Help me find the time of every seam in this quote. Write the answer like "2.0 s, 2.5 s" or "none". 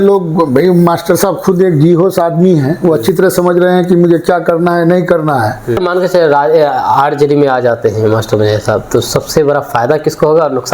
5.8 s